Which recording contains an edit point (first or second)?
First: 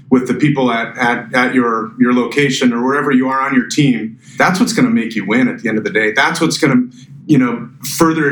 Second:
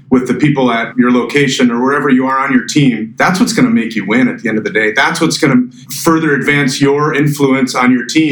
second